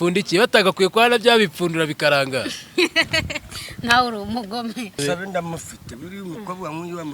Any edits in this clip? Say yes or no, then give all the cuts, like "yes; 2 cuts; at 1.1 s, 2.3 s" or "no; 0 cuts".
yes; 1 cut; at 5.0 s